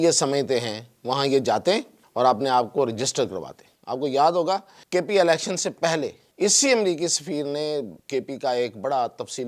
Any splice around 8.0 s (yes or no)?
yes